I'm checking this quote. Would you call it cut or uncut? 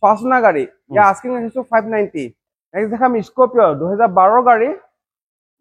cut